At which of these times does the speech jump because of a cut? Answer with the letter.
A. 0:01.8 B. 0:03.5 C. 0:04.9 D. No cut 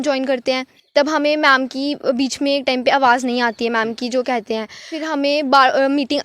C